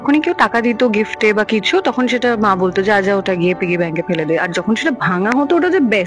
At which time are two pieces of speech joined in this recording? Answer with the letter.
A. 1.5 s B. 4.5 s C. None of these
C